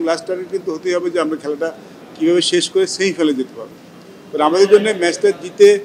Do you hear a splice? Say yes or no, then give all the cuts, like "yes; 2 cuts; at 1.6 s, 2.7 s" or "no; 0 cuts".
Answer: no; 0 cuts